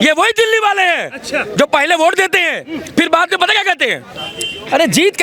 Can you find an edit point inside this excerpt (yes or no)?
no